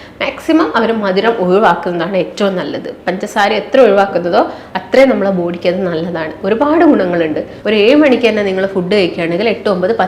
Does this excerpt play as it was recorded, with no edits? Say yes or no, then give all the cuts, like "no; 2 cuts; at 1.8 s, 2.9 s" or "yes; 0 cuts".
no; 1 cut; at 7.5 s